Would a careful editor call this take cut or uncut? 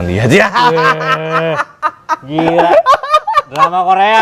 uncut